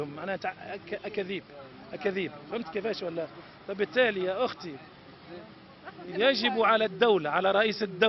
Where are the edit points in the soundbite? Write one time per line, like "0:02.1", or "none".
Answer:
none